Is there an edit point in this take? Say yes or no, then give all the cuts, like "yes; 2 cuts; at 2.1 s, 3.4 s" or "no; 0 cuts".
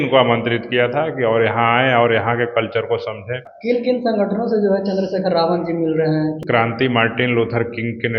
yes; 2 cuts; at 3.5 s, 6.4 s